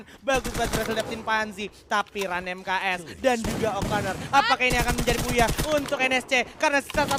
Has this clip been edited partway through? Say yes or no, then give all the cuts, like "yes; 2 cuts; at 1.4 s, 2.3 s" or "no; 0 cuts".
no; 0 cuts